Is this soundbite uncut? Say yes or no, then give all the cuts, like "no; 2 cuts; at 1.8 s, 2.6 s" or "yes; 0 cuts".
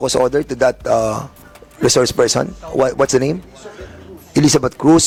yes; 0 cuts